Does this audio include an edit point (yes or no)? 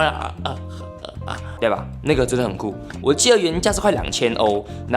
yes